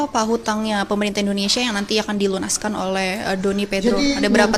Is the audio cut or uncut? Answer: uncut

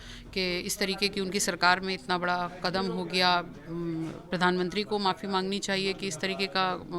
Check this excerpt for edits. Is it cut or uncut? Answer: uncut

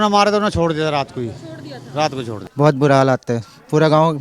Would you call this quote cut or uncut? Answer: cut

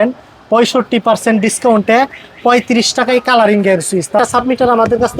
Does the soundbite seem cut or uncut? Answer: cut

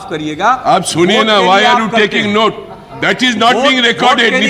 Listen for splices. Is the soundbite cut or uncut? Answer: uncut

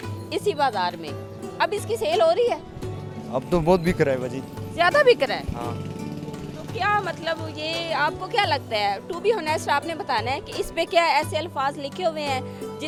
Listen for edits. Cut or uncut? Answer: uncut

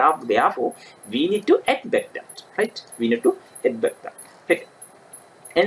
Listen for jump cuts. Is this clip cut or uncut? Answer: uncut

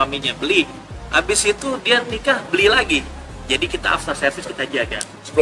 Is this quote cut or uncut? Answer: uncut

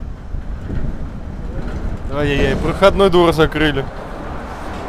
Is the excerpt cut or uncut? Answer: uncut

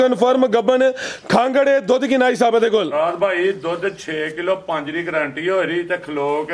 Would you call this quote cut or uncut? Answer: uncut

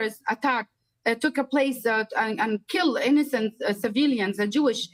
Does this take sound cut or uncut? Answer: uncut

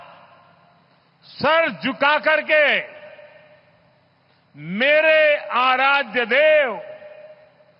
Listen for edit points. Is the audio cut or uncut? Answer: uncut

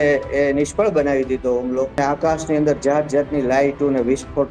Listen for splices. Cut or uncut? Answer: cut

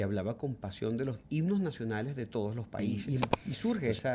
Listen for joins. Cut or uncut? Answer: cut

